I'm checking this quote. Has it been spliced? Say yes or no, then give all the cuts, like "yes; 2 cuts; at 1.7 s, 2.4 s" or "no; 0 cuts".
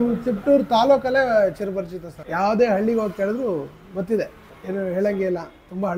no; 0 cuts